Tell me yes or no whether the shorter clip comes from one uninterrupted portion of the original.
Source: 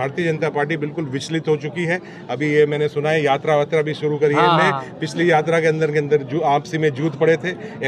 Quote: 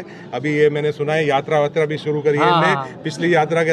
yes